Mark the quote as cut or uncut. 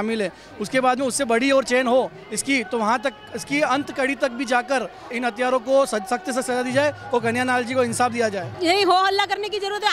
cut